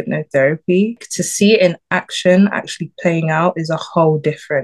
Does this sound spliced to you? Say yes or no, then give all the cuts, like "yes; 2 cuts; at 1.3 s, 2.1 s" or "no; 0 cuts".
no; 0 cuts